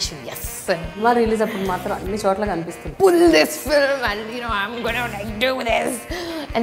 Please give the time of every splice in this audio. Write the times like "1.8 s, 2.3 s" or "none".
1.0 s, 2.8 s